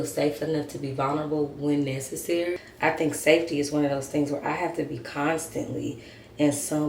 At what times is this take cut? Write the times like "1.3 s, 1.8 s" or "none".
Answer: 2.7 s